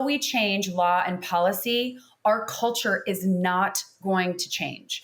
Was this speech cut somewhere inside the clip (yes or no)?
no